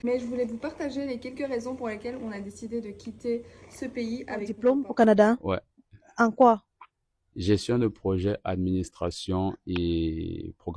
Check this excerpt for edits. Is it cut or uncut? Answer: cut